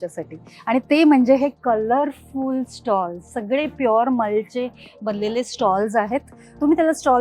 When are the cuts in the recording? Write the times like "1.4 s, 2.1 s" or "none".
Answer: none